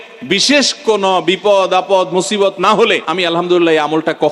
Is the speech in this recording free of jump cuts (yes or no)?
no